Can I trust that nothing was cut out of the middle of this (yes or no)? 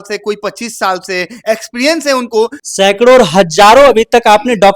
no